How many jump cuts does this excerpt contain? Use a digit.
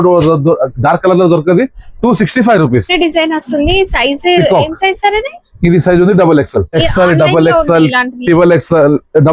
2